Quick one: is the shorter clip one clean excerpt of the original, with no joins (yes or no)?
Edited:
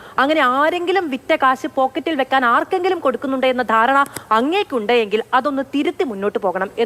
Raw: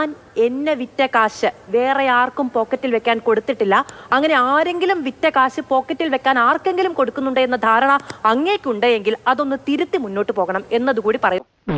yes